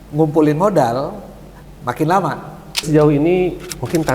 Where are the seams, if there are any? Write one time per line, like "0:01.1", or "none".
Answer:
0:02.9

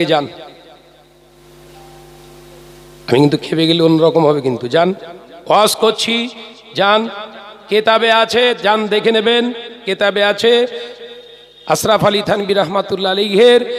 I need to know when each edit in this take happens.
none

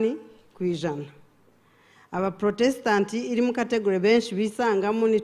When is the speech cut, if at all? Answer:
none

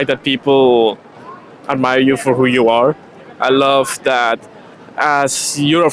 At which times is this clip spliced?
none

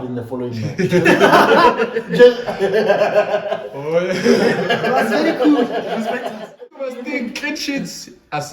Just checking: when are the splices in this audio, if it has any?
0:06.6

